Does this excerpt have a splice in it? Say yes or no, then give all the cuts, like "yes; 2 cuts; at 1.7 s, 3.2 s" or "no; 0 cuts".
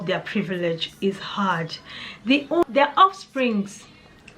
yes; 1 cut; at 2.6 s